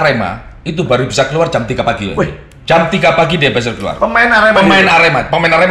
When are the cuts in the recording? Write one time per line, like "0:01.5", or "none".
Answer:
none